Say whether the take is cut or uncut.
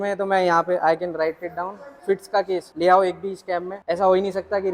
cut